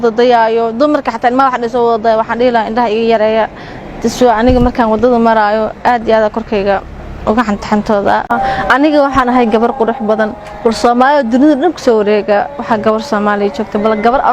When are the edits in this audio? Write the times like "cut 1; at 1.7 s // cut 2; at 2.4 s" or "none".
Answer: cut 1; at 8.3 s